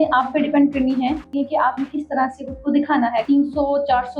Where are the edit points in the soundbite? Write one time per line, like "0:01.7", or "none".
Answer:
0:01.3
0:03.2